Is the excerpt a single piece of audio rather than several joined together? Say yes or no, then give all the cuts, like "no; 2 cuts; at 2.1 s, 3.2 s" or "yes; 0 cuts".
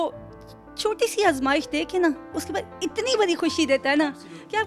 yes; 0 cuts